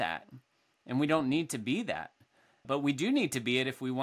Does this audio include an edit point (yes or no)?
yes